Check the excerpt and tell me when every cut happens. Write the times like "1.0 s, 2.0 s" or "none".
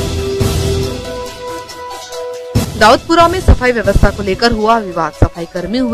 1.3 s